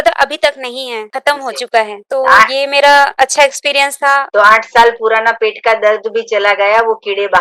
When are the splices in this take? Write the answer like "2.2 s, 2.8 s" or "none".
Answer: 1.1 s, 2.0 s, 3.1 s, 4.3 s